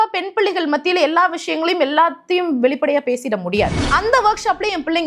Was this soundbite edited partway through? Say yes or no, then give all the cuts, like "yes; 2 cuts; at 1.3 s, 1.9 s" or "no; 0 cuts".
yes; 1 cut; at 3.8 s